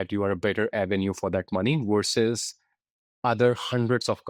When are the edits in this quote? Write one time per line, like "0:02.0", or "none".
none